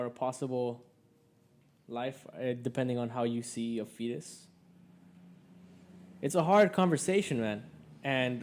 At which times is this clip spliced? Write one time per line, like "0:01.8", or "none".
none